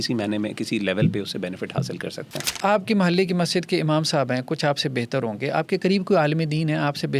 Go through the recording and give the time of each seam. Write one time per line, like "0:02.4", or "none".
0:02.4